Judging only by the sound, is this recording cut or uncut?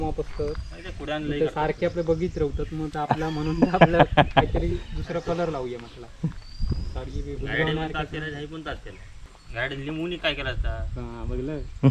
uncut